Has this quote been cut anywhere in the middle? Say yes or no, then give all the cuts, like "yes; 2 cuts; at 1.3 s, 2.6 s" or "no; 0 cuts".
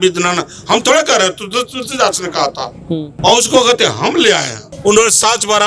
yes; 2 cuts; at 3.1 s, 4.6 s